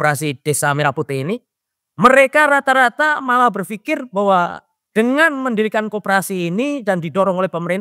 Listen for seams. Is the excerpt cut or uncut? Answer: uncut